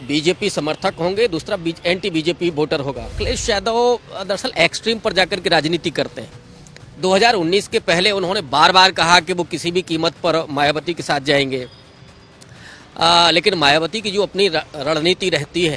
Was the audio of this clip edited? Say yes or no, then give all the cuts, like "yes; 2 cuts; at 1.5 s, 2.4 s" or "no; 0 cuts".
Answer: yes; 1 cut; at 3.2 s